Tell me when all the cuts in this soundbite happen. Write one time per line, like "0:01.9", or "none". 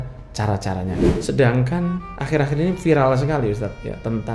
0:01.0